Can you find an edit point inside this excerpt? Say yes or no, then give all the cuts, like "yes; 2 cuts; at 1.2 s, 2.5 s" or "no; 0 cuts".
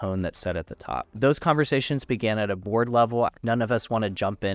yes; 2 cuts; at 1.2 s, 3.3 s